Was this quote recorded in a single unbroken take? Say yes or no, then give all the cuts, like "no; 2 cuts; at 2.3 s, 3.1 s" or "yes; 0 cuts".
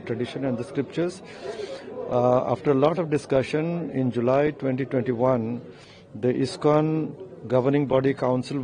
yes; 0 cuts